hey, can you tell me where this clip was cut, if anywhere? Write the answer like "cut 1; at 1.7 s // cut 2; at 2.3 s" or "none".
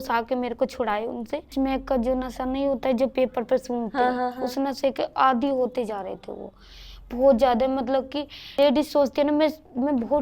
cut 1; at 1.5 s // cut 2; at 8.5 s